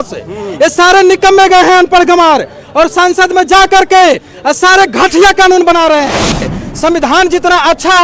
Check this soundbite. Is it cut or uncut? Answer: cut